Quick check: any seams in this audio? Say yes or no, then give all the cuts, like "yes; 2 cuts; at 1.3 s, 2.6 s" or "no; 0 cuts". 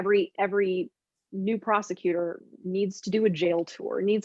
no; 0 cuts